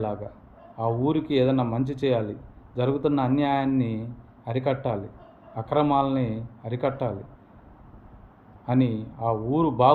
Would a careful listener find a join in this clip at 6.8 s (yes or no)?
no